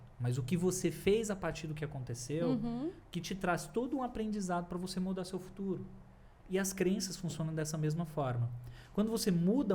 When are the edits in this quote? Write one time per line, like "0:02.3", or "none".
none